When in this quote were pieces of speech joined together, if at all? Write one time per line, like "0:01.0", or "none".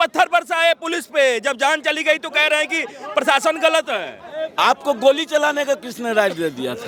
none